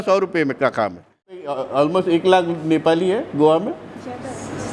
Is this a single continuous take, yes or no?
no